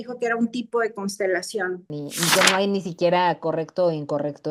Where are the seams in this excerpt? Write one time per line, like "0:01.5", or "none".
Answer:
0:02.0